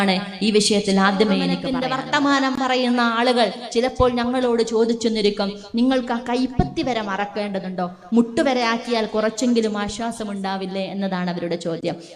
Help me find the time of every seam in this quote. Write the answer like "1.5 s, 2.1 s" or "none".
1.7 s